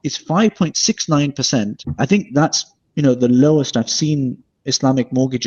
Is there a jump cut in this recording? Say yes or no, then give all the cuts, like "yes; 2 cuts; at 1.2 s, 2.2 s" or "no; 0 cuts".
yes; 1 cut; at 1.8 s